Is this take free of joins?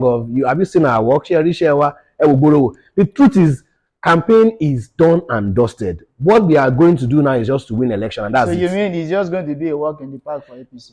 yes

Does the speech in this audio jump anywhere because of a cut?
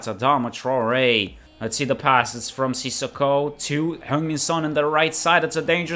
yes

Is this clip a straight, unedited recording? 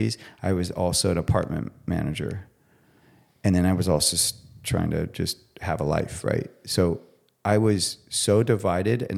yes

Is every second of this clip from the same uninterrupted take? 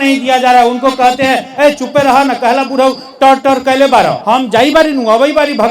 no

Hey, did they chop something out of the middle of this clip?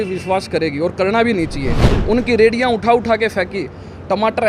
yes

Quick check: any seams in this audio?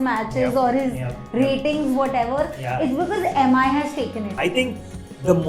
yes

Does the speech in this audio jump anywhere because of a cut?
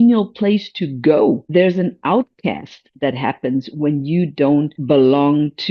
yes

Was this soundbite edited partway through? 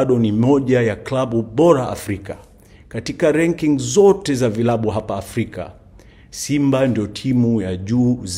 no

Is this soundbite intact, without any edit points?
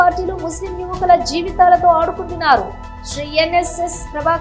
yes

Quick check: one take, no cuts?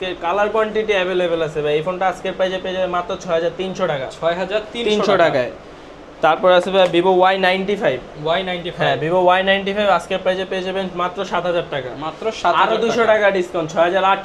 yes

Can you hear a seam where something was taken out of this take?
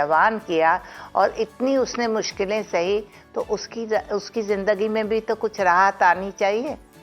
no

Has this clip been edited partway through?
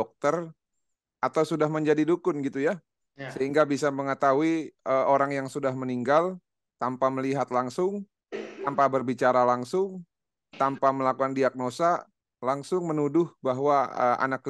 no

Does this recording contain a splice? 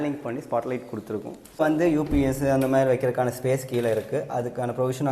yes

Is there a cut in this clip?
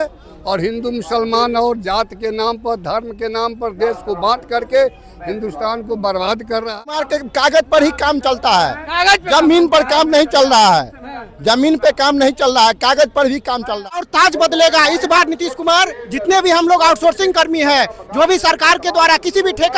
yes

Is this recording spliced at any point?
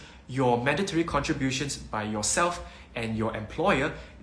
no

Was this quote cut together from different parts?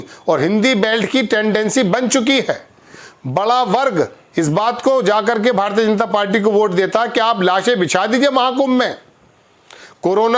no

